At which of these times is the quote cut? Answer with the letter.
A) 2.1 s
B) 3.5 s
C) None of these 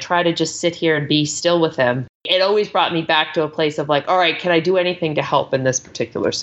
A